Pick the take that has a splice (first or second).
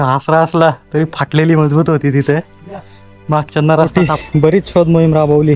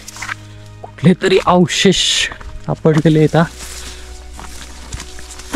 first